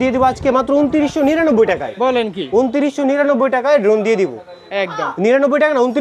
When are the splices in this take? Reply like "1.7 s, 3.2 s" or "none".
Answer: none